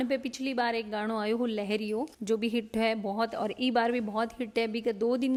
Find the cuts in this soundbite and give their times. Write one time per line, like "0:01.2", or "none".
none

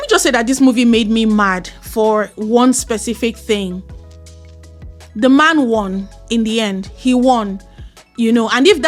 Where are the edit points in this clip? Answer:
none

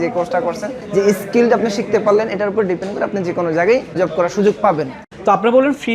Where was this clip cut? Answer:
0:05.0

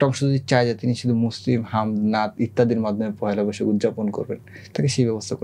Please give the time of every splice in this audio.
none

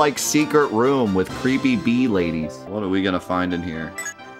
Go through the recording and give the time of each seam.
0:02.6

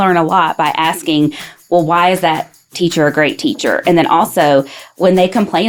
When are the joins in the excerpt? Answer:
none

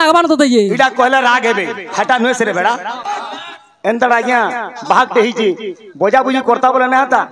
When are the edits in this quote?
0:03.0

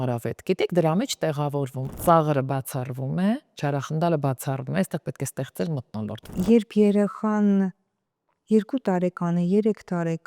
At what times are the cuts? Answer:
0:01.8
0:06.3

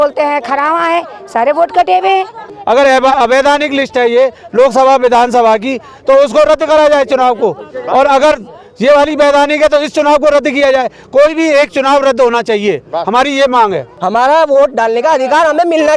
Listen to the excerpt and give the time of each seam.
0:02.4
0:13.9

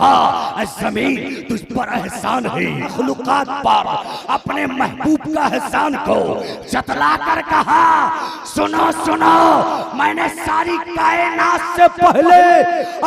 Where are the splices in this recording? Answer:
0:02.9

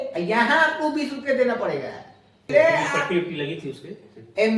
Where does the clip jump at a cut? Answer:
0:02.5

